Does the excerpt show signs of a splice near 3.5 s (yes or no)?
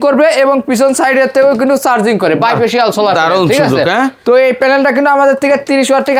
no